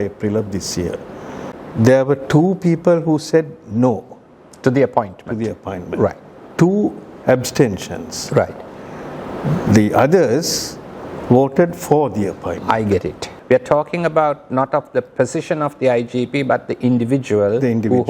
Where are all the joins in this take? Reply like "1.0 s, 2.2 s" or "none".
1.5 s, 13.3 s